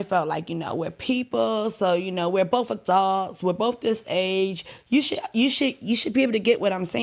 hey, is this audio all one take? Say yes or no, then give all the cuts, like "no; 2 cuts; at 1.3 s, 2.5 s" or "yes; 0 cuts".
yes; 0 cuts